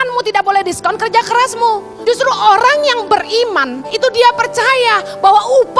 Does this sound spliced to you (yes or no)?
yes